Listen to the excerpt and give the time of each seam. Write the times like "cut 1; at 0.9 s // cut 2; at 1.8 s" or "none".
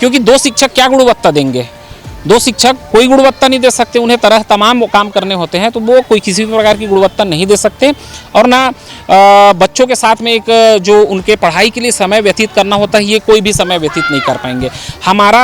none